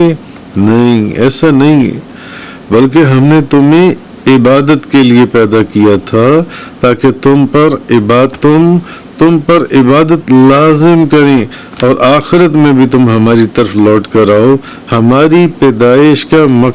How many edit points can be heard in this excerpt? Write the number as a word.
one